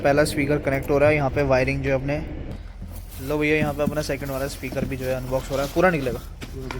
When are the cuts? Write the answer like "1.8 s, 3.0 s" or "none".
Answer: 2.7 s

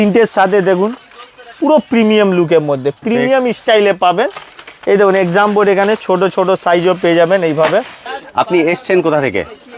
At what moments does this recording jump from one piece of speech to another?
8.2 s

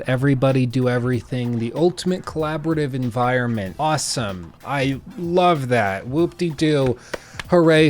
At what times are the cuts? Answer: 3.7 s

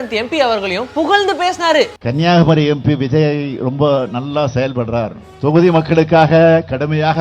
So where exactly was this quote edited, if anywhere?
2.0 s

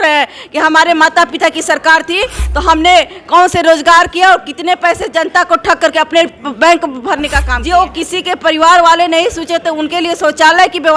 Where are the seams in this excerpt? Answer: 7.5 s

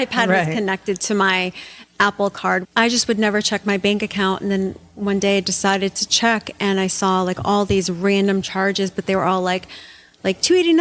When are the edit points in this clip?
2.7 s

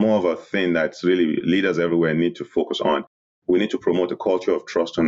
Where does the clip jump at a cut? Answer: 1.4 s

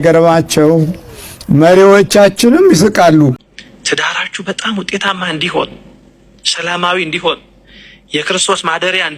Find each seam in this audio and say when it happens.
3.5 s

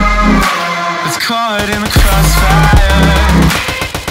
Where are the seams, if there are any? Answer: 0.9 s

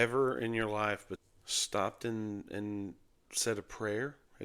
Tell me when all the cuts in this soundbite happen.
1.1 s

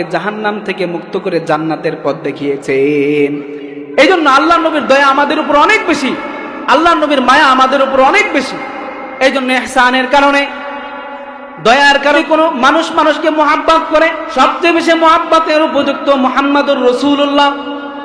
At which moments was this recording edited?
12.2 s, 14.2 s

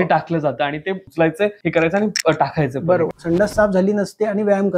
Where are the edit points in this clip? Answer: 1.4 s, 3.2 s

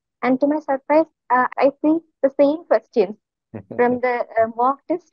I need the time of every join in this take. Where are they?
none

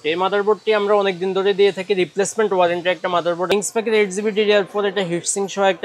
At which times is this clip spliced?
3.5 s

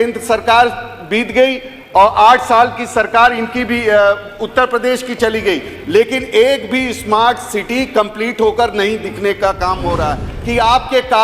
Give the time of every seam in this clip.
10.3 s

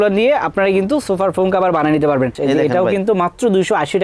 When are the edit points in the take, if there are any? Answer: 2.3 s

